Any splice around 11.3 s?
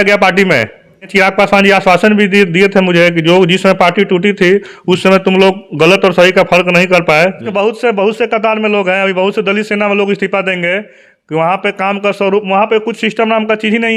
no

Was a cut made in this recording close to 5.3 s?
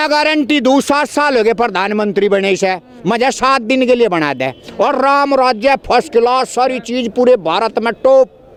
no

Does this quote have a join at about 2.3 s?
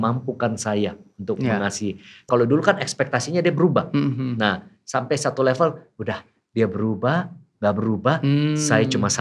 yes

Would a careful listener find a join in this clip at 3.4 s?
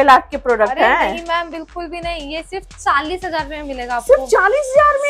no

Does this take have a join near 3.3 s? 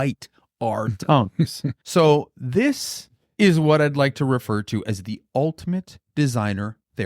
no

